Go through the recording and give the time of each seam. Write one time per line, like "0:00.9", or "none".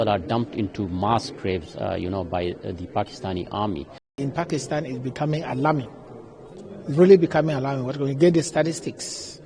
0:04.2